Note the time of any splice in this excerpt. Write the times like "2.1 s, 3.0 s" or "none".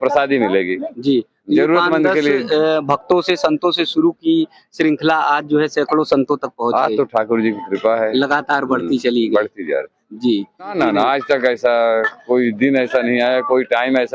10.7 s